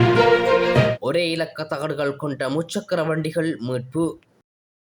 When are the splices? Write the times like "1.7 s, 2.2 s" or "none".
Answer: none

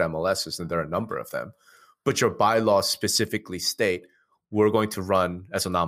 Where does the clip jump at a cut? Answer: none

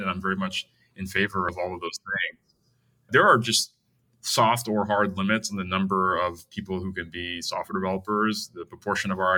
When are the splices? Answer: 1.5 s, 3.1 s

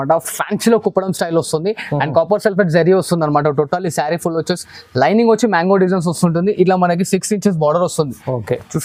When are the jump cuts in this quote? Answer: none

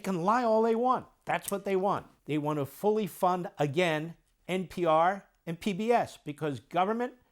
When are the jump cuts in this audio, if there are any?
2.1 s

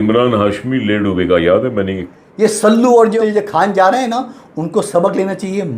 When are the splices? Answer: 2.0 s, 3.1 s

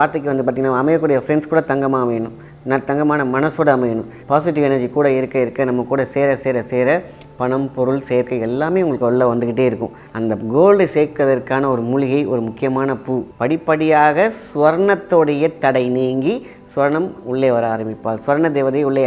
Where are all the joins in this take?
4.1 s, 10.0 s, 13.3 s

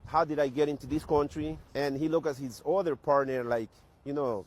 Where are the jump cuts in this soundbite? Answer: 1.6 s

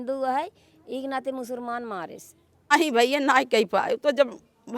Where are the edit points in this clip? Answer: 2.7 s

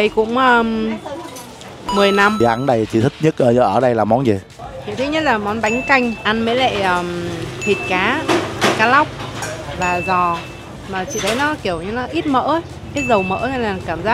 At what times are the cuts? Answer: none

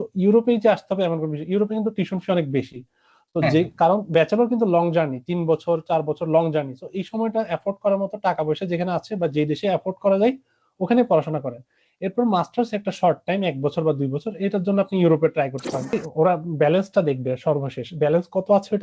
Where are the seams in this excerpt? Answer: 16.0 s

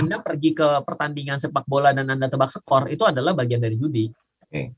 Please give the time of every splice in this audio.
none

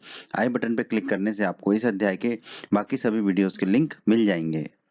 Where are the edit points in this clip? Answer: none

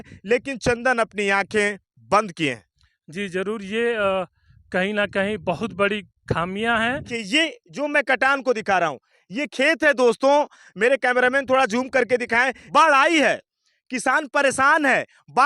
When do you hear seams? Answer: 7.1 s, 12.6 s

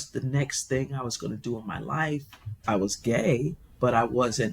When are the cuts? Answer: 2.5 s

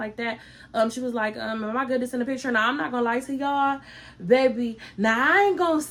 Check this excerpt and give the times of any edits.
none

